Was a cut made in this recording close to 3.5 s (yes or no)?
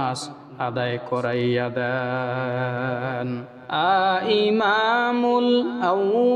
yes